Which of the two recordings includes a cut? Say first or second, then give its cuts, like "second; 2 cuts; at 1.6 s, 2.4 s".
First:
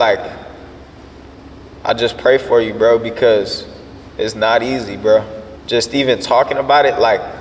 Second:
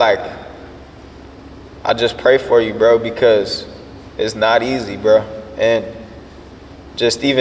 first; 1 cut; at 5.4 s